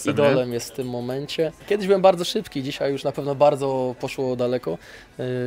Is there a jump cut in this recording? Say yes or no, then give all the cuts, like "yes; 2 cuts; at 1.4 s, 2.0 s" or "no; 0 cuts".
yes; 1 cut; at 1.6 s